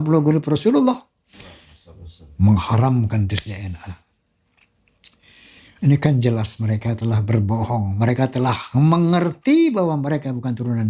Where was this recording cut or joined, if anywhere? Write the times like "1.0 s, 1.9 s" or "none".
none